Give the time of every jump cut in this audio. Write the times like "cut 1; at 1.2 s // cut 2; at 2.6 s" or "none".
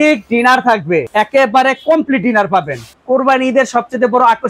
cut 1; at 1.1 s // cut 2; at 2.9 s